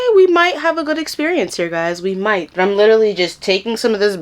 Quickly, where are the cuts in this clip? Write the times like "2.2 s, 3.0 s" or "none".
2.5 s